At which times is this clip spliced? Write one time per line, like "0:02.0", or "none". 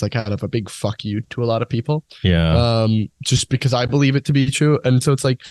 none